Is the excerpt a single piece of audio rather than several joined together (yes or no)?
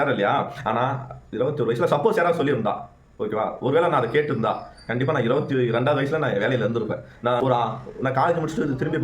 no